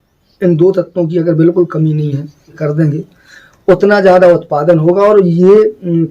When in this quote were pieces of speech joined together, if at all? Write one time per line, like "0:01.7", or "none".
0:02.6